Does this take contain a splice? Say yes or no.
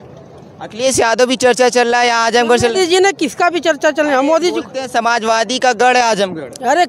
no